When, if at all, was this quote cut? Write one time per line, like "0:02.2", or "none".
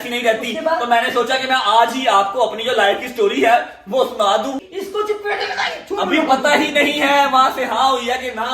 0:04.6